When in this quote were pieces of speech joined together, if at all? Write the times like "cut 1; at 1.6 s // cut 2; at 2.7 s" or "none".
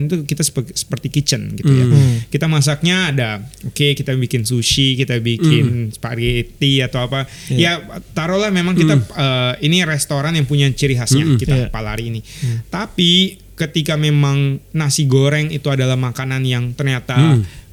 none